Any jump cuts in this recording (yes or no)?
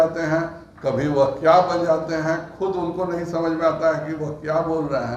no